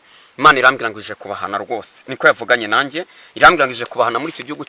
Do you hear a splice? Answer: no; 0 cuts

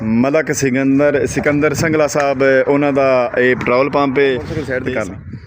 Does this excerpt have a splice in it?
yes; 1 cut; at 4.5 s

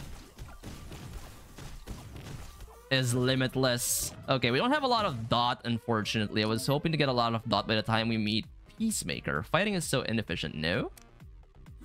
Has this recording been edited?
no; 0 cuts

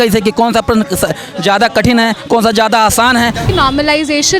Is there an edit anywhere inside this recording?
yes; 1 cut; at 3.5 s

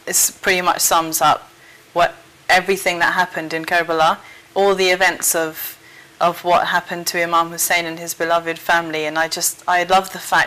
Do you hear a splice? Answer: no; 0 cuts

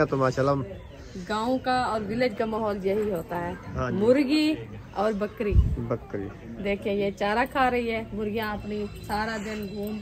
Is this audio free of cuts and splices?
yes; 0 cuts

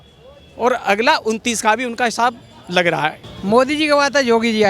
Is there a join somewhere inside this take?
yes; 1 cut; at 3.3 s

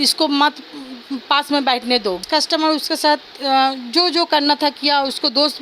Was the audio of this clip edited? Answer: yes; 1 cut; at 2.2 s

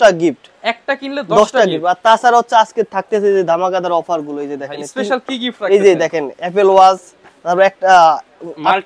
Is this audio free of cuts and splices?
yes; 0 cuts

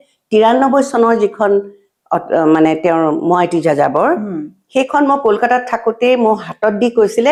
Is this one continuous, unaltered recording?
yes; 0 cuts

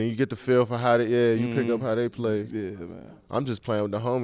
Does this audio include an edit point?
no; 0 cuts

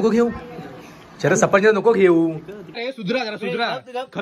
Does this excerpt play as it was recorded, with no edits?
no; 1 cut; at 2.8 s

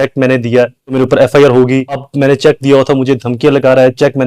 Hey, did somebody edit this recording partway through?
yes; 2 cuts; at 0.9 s, 2.1 s

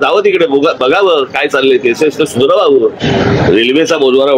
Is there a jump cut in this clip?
yes; 1 cut; at 3.0 s

